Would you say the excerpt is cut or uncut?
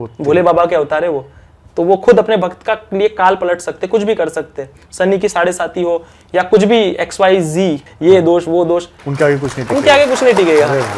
cut